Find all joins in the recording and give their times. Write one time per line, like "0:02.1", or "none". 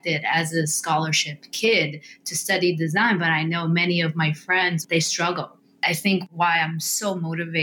0:05.6